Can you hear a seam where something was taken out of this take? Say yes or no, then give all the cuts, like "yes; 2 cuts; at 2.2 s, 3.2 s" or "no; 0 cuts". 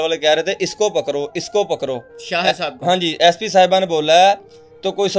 no; 0 cuts